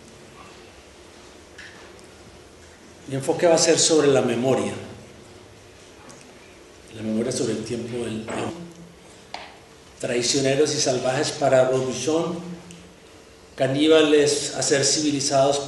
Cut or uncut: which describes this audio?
uncut